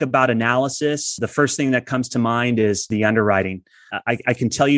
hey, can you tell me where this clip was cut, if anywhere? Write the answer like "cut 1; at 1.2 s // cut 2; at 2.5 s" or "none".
cut 1; at 1.2 s // cut 2; at 2.9 s // cut 3; at 3.9 s